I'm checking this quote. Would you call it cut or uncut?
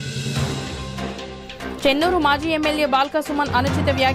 uncut